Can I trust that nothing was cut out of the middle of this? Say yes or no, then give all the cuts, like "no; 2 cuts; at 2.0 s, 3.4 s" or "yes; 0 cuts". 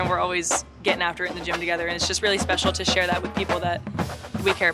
yes; 0 cuts